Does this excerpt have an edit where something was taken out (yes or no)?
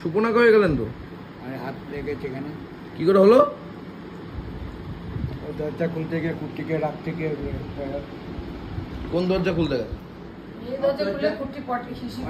no